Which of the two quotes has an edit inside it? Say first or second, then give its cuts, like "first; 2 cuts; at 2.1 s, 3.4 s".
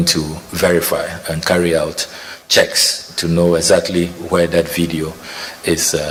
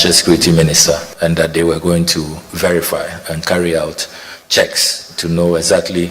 second; 1 cut; at 1.1 s